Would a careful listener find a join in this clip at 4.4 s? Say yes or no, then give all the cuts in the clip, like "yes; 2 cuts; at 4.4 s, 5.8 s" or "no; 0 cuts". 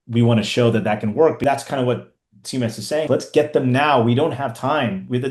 no; 2 cuts; at 1.4 s, 3.1 s